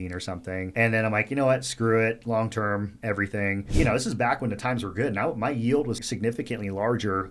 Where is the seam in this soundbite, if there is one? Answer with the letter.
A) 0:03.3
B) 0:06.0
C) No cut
B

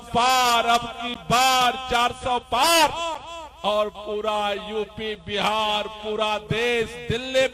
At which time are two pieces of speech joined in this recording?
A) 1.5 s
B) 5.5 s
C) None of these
C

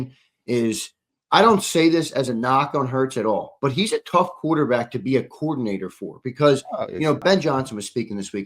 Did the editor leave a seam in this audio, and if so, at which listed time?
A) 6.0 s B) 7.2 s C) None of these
B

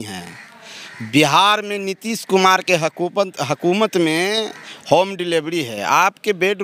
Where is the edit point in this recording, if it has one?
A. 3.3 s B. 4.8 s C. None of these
C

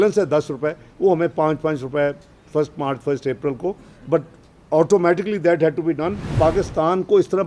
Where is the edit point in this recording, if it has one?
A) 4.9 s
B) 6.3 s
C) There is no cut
B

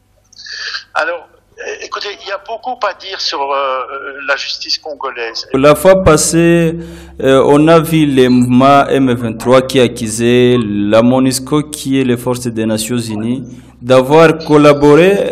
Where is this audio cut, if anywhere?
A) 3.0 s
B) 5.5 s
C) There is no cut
B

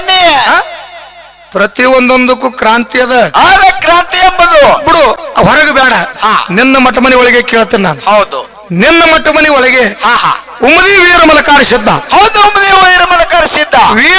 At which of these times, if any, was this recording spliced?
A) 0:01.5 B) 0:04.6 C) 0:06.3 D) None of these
D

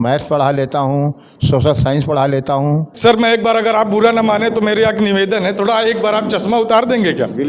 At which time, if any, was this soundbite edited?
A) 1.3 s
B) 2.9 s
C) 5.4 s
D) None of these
B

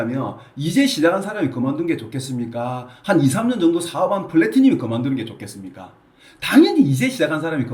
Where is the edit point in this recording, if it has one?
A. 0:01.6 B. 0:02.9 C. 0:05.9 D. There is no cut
D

